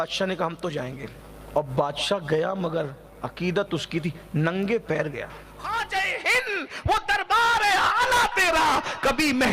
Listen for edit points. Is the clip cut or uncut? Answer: cut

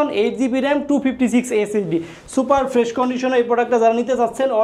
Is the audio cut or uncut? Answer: uncut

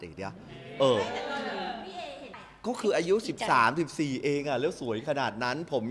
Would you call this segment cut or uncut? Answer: cut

